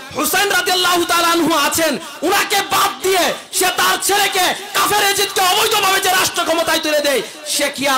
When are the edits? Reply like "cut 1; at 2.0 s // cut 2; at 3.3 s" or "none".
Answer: none